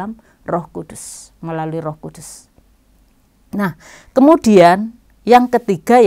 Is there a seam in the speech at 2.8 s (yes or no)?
no